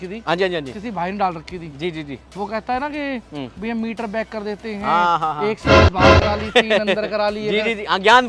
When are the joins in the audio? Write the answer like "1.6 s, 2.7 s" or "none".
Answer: none